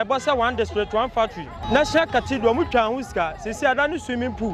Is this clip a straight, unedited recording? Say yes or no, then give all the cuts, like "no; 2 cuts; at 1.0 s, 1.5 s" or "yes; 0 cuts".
no; 1 cut; at 1.5 s